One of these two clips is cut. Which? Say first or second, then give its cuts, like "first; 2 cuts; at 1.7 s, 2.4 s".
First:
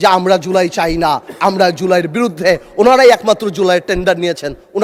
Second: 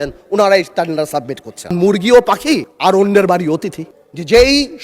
second; 2 cuts; at 1.7 s, 3.9 s